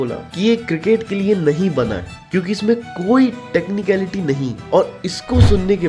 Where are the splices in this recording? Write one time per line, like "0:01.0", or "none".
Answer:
none

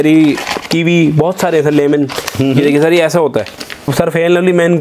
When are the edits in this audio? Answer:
0:03.9

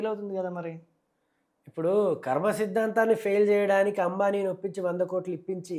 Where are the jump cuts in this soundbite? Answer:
none

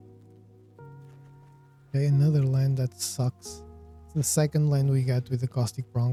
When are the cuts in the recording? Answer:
none

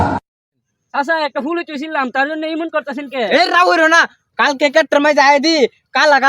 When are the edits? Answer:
0:00.9

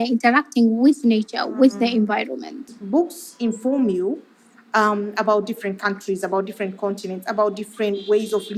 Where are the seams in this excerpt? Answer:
0:02.7

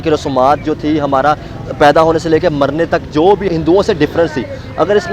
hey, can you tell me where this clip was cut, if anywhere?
0:03.5

